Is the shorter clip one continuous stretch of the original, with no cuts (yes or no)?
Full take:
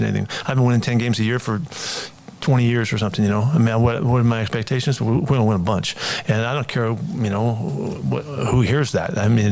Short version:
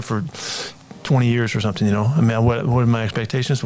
yes